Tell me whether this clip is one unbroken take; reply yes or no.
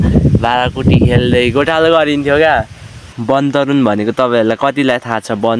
no